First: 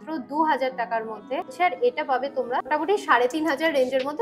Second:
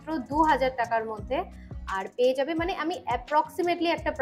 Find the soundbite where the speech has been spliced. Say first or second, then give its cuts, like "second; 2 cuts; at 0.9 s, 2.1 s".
first; 2 cuts; at 1.5 s, 2.7 s